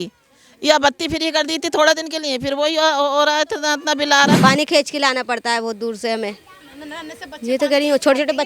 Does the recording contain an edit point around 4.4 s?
yes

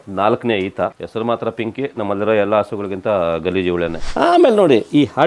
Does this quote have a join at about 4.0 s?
yes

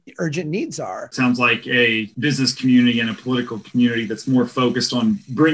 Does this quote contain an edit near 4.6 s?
no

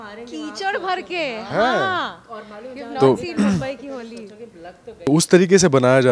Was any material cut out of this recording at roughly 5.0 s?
yes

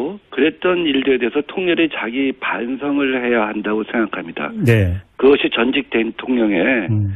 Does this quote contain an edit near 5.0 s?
no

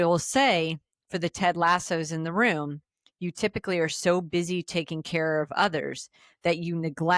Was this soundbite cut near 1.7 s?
no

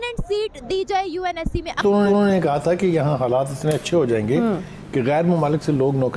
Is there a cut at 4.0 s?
no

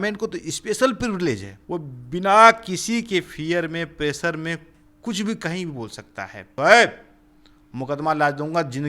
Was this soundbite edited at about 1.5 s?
yes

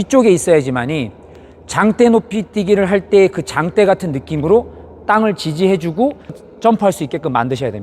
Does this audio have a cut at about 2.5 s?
no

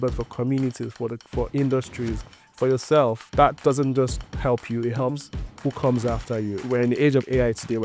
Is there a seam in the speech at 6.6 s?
yes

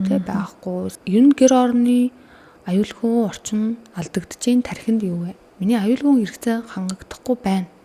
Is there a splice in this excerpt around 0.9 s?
yes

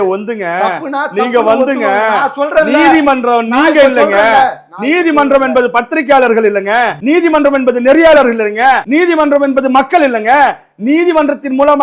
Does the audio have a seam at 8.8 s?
yes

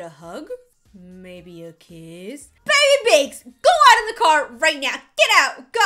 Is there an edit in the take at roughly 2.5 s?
yes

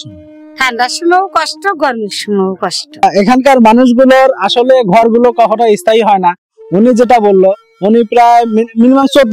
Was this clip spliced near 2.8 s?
yes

